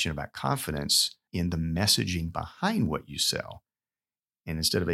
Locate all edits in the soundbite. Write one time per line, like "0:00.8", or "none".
0:01.2